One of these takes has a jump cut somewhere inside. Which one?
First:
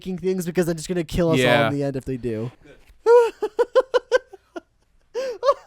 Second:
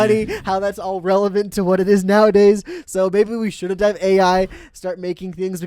first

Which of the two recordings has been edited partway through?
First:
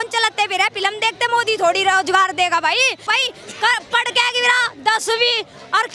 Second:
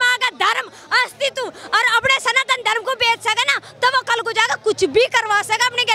first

